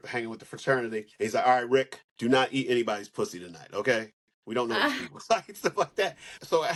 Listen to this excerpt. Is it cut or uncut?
uncut